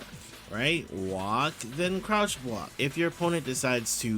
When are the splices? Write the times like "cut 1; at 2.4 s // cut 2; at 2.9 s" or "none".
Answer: cut 1; at 2.7 s

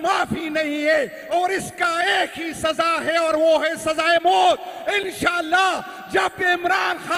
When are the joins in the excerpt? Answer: none

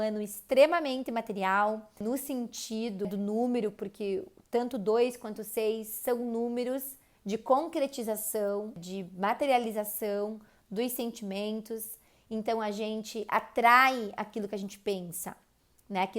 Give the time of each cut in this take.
cut 1; at 2.0 s // cut 2; at 3.1 s // cut 3; at 8.9 s

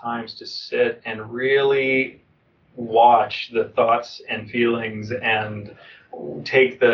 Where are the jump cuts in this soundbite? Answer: none

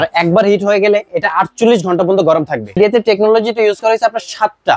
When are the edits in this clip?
cut 1; at 2.8 s

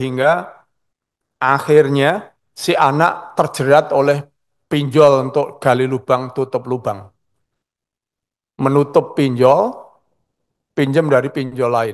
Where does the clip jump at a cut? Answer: none

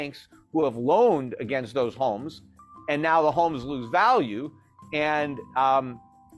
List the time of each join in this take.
none

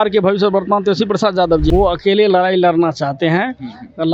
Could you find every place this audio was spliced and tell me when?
cut 1; at 1.7 s

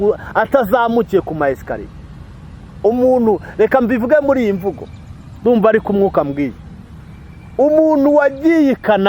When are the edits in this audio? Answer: none

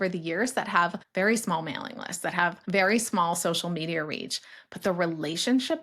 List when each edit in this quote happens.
cut 1; at 1.0 s // cut 2; at 2.6 s

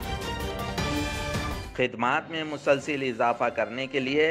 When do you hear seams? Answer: cut 1; at 1.6 s

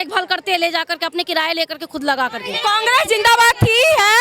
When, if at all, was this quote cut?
cut 1; at 2.5 s

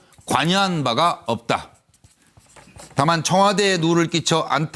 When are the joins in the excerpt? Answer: cut 1; at 3.8 s

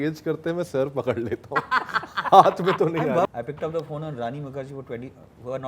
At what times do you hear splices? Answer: cut 1; at 3.2 s

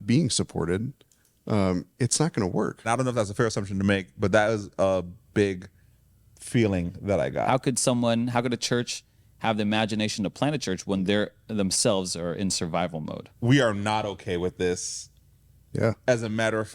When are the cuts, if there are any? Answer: cut 1; at 2.9 s // cut 2; at 7.5 s // cut 3; at 13.2 s

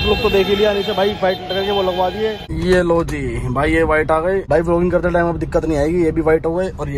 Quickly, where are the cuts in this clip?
none

